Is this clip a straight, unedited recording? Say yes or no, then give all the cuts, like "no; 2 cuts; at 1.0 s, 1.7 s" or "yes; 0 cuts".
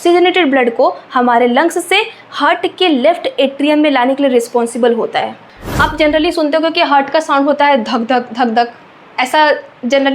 no; 1 cut; at 5.4 s